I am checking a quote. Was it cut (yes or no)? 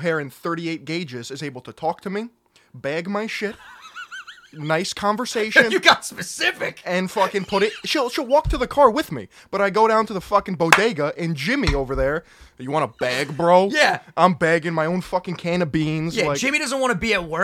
no